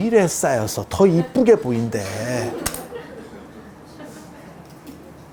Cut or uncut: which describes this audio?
uncut